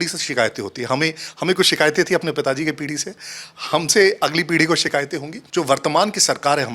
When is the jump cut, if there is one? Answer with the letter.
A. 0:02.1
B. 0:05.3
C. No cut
B